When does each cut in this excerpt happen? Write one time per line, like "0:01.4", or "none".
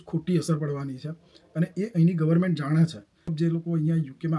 0:03.3